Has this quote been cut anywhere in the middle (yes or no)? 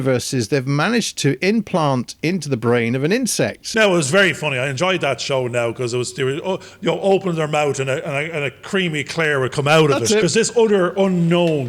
yes